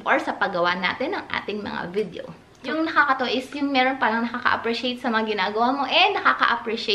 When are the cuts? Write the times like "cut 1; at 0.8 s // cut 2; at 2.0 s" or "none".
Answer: cut 1; at 2.5 s

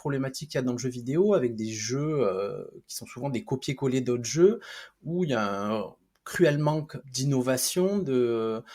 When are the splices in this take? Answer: cut 1; at 7.0 s

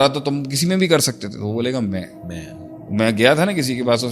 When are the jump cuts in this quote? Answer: none

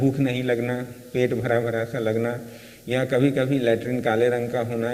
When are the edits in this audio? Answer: none

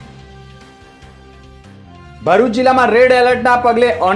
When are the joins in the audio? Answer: cut 1; at 2.2 s

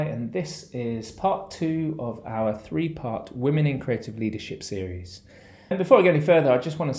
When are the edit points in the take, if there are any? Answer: cut 1; at 5.7 s

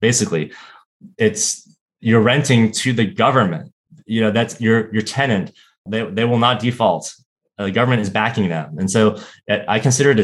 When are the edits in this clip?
cut 1; at 3.8 s

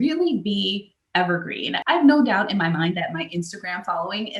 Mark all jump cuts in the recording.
cut 1; at 1.8 s

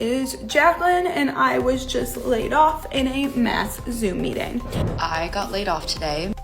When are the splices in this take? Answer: cut 1; at 4.8 s

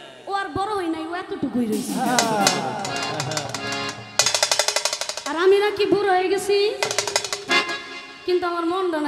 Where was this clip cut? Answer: cut 1; at 4.3 s

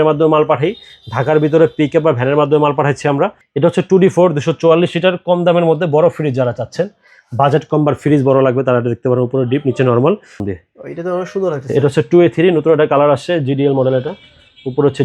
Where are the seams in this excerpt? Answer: cut 1; at 3.4 s // cut 2; at 10.4 s

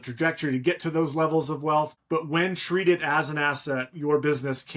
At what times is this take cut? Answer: cut 1; at 2.0 s

